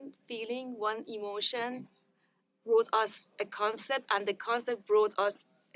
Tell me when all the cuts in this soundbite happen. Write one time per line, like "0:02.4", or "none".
none